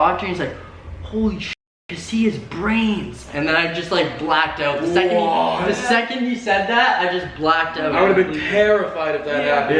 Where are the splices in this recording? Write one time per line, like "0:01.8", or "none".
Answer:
none